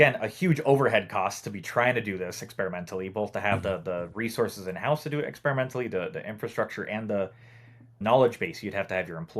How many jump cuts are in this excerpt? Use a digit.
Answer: 1